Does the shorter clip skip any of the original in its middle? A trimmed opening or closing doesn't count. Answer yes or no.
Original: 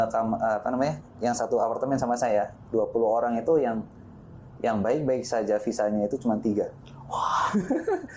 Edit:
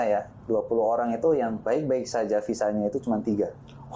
yes